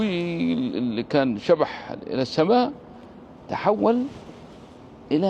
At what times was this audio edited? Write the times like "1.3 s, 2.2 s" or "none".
none